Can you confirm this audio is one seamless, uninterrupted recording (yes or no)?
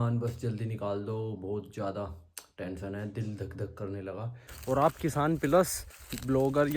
no